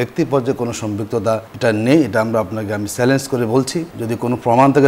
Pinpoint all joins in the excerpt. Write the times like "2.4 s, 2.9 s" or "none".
1.5 s, 3.9 s